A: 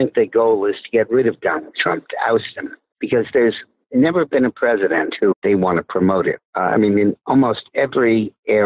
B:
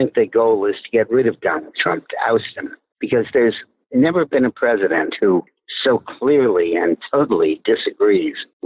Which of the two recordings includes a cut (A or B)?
B